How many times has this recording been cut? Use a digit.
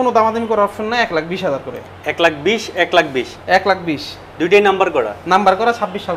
0